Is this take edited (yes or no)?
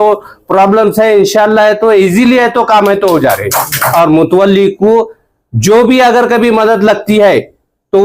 yes